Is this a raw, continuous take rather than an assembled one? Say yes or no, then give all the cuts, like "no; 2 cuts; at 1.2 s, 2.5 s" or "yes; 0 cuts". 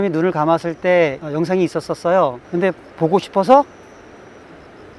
yes; 0 cuts